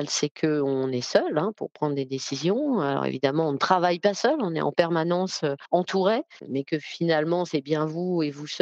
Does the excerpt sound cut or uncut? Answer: cut